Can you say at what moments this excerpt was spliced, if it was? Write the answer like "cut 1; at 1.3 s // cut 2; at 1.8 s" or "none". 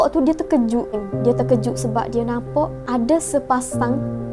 cut 1; at 1.1 s // cut 2; at 2.8 s